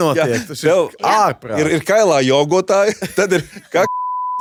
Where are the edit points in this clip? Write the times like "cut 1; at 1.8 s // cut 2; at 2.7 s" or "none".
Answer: none